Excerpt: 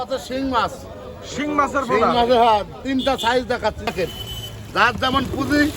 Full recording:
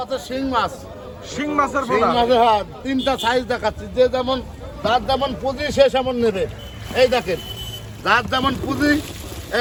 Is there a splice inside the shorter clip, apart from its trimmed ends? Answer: yes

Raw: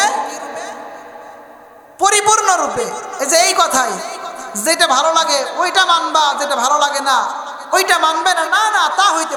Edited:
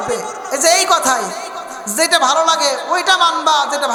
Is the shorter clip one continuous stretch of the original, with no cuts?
yes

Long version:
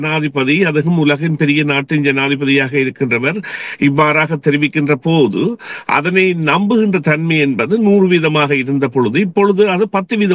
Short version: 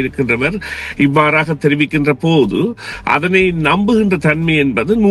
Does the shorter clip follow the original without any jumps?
yes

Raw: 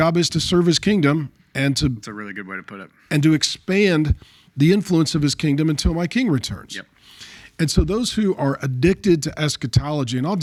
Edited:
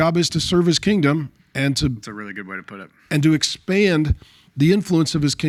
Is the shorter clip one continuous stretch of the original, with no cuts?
yes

